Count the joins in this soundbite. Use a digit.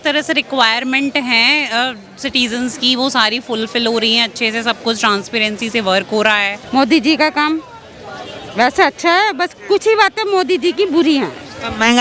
1